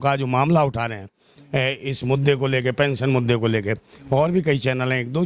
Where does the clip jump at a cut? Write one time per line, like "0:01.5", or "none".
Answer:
none

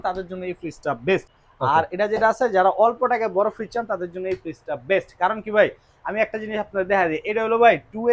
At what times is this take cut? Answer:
0:01.3

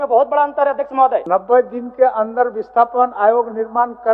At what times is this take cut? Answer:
0:01.2

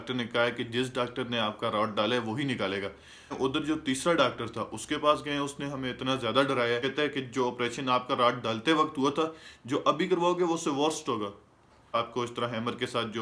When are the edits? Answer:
0:03.1
0:06.8
0:11.9

